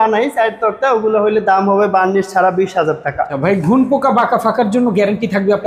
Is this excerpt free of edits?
no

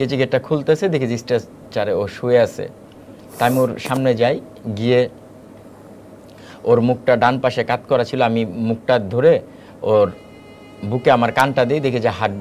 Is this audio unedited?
yes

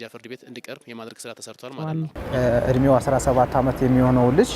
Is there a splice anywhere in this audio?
yes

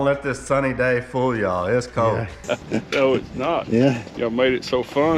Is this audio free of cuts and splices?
no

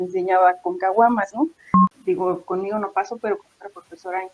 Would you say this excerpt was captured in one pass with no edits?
no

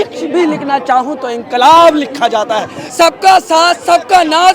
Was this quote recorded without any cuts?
no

